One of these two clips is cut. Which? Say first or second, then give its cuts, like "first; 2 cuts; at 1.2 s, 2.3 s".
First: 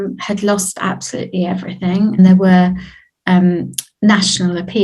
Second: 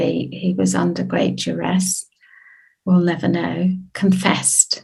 first; 1 cut; at 2.2 s